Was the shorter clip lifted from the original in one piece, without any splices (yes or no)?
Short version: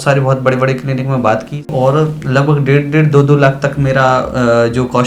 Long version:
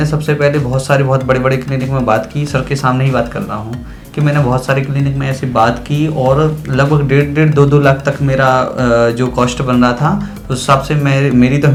no